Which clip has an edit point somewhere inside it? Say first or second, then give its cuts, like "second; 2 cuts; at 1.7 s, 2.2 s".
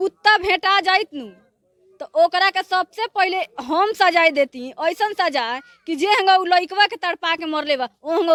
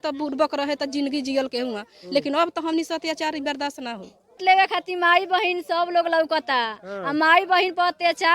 second; 1 cut; at 4.4 s